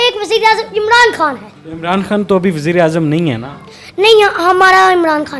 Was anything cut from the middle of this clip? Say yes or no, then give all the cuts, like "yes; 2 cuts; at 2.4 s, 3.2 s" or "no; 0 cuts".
no; 0 cuts